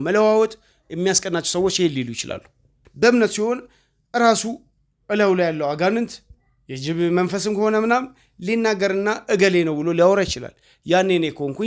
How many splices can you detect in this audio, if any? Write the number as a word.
one